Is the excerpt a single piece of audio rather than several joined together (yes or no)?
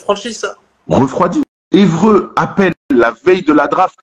no